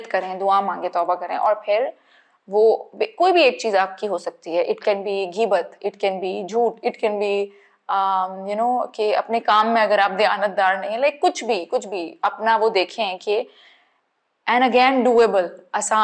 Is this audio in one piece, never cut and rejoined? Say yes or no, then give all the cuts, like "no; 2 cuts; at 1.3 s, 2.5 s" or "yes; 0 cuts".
yes; 0 cuts